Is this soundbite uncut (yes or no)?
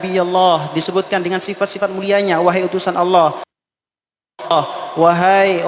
yes